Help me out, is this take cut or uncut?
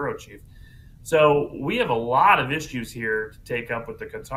cut